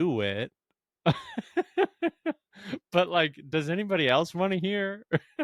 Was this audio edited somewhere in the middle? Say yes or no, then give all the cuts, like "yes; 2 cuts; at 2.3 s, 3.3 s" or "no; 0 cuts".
no; 0 cuts